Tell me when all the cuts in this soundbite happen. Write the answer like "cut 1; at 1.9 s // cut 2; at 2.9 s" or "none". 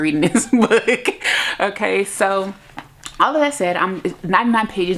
none